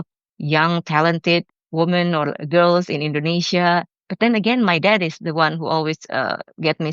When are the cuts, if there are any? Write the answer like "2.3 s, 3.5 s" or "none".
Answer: 1.5 s